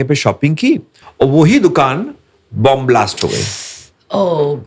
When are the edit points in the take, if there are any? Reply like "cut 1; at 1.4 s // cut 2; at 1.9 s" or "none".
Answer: cut 1; at 1.0 s